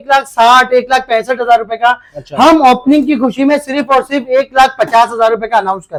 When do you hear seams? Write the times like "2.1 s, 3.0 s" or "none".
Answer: none

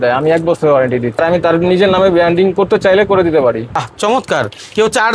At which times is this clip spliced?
1.1 s, 3.8 s

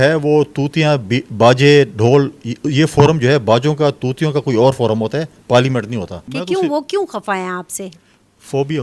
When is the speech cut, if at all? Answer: 6.2 s

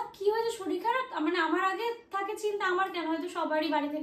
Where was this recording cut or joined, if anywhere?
none

